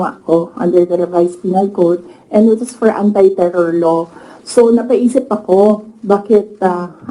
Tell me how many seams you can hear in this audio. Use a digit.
0